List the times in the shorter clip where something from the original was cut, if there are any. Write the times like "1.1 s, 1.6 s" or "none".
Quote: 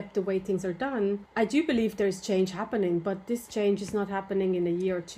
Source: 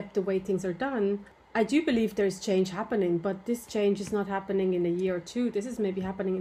1.3 s